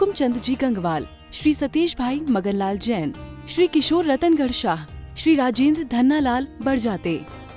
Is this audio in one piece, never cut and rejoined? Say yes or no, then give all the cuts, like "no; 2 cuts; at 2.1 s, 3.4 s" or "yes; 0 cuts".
yes; 0 cuts